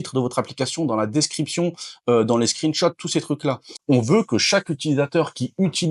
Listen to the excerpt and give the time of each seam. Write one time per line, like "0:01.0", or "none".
0:03.7